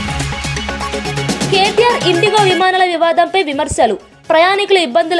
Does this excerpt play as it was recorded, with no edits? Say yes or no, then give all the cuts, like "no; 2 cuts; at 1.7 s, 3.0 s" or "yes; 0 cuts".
yes; 0 cuts